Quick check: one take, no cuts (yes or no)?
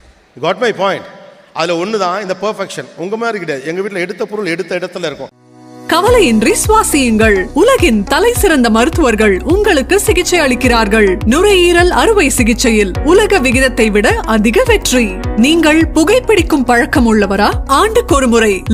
no